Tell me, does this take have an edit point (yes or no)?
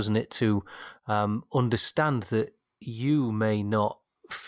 no